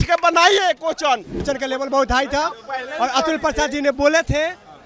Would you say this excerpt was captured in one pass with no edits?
no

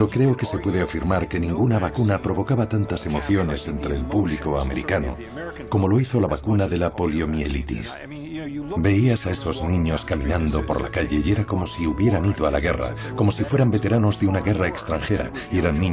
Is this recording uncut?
yes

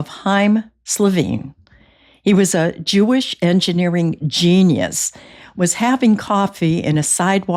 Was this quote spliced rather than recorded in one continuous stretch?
no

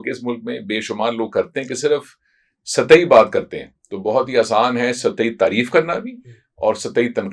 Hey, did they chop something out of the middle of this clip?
no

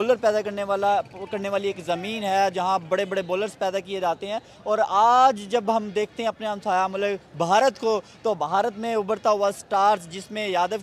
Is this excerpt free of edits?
yes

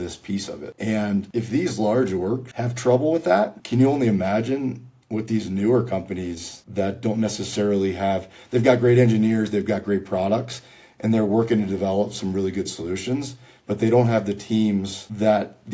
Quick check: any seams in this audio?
no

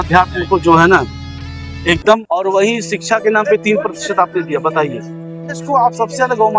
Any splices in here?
yes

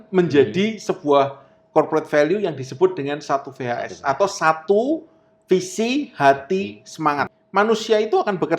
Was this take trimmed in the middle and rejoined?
yes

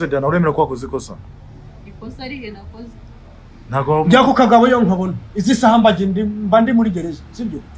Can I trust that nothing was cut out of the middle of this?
yes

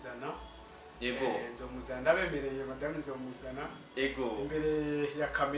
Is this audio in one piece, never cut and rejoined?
yes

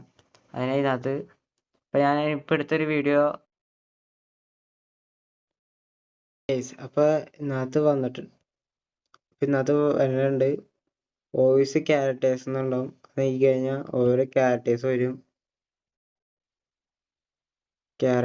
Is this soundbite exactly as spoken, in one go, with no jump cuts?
yes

